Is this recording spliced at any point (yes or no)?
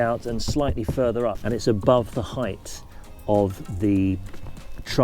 no